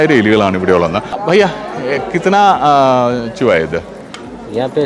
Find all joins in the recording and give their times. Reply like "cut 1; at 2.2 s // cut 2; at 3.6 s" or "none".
cut 1; at 1.1 s